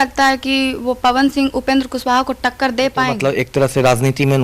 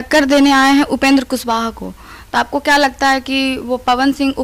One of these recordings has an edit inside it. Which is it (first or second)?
first